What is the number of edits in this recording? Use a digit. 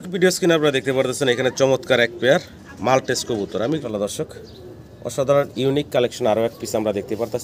1